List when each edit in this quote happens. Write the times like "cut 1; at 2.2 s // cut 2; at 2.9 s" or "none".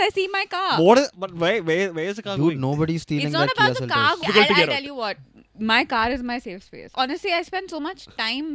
cut 1; at 4.2 s // cut 2; at 6.9 s